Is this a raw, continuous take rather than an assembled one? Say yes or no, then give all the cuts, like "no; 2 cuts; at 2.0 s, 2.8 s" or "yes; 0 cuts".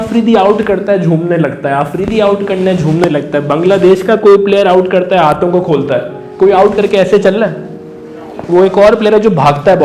yes; 0 cuts